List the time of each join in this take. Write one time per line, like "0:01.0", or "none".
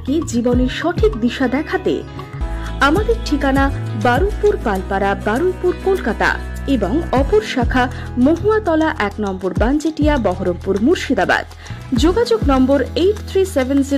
0:02.4